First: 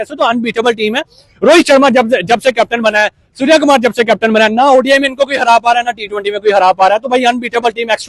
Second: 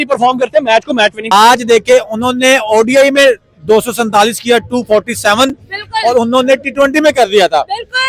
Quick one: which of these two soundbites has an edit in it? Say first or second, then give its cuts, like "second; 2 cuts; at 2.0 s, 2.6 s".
second; 1 cut; at 1.2 s